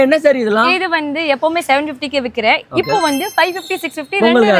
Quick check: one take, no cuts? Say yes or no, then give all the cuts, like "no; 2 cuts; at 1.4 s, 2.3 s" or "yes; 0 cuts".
yes; 0 cuts